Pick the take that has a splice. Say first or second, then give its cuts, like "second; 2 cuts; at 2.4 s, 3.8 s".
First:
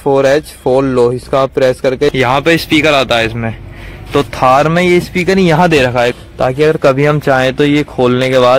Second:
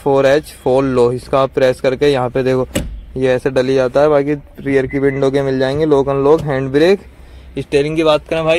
first; 2 cuts; at 2.1 s, 6.2 s